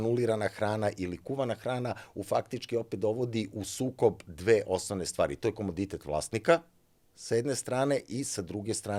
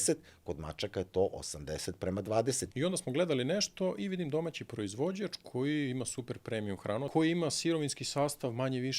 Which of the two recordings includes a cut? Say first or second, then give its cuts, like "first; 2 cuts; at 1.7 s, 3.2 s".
second; 2 cuts; at 2.6 s, 7.1 s